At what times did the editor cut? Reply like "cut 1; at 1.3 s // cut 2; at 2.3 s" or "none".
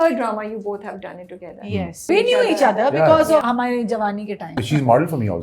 cut 1; at 2.1 s // cut 2; at 3.4 s // cut 3; at 4.6 s